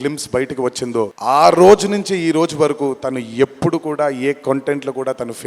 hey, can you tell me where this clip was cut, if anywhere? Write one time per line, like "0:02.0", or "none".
0:01.2

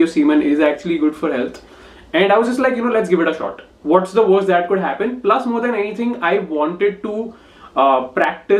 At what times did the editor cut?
none

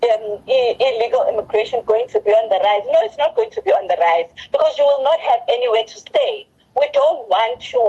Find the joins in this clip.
none

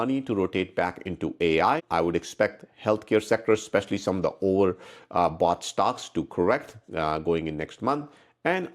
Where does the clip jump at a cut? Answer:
0:01.8

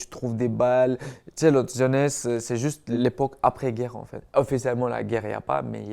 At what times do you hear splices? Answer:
0:03.0
0:04.2

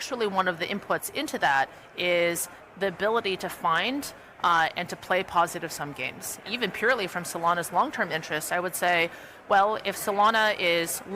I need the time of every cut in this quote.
0:06.3

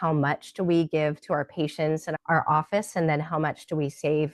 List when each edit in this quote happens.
0:02.1

